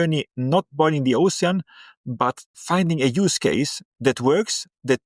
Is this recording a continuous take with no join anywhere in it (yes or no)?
yes